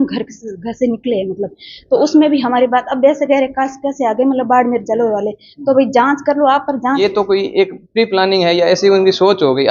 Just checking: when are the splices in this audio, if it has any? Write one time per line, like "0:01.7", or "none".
0:07.0